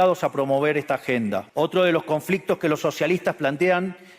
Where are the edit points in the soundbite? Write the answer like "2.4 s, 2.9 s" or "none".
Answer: 1.5 s